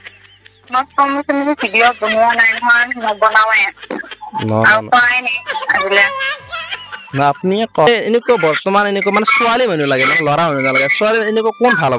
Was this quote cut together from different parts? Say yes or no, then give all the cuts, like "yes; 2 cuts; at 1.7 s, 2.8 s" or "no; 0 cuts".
yes; 1 cut; at 7.9 s